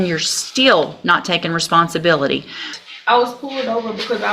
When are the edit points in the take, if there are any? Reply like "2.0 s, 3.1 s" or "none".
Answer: 2.7 s

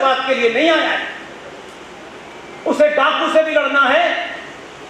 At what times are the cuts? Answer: none

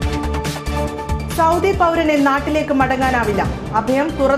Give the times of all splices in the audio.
none

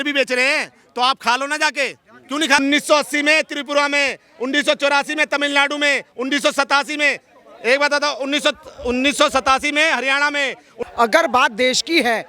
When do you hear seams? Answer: 2.6 s, 10.7 s

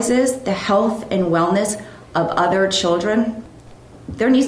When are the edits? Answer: 3.4 s

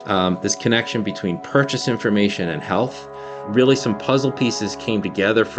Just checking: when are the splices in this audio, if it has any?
none

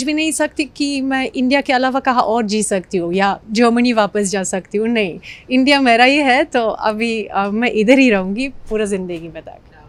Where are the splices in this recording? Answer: none

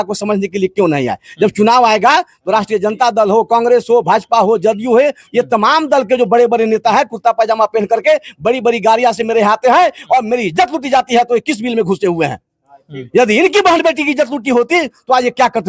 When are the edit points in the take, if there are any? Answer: none

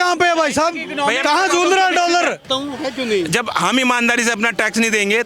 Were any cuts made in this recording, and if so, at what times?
2.5 s

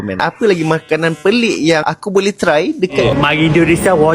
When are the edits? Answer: 3.0 s

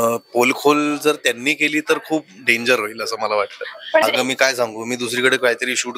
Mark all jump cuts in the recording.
4.0 s

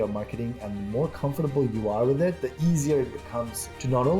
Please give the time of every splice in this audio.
2.5 s

